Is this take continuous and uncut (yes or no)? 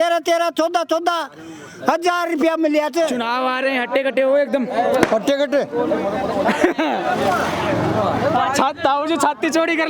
no